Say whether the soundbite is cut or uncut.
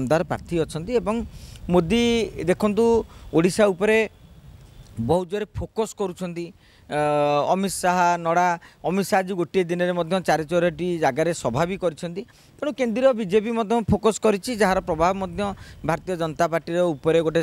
uncut